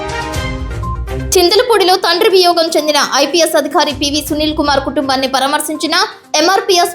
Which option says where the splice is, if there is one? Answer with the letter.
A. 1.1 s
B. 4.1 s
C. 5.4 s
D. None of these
A